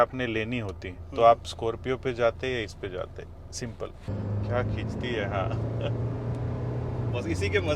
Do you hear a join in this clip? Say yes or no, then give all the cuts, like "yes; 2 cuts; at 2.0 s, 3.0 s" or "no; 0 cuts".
yes; 1 cut; at 4.0 s